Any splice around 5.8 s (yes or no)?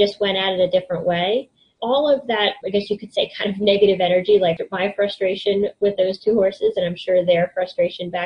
no